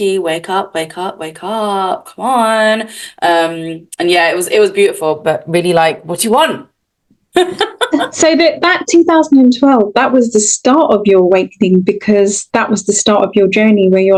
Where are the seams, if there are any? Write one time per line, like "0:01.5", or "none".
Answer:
none